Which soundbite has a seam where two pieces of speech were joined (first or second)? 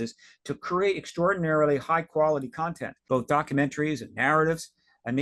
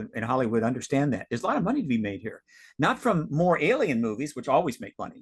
first